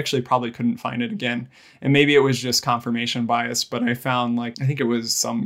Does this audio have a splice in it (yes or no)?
yes